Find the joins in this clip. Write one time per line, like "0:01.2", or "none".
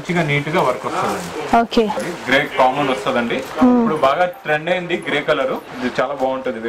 0:02.0
0:05.7